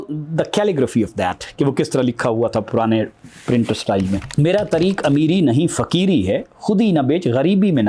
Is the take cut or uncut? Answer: uncut